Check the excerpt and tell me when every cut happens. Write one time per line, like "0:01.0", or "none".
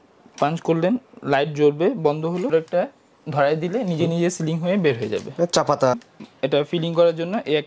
0:02.5
0:06.0